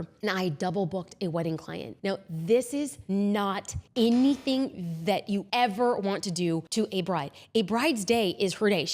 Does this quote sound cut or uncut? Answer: cut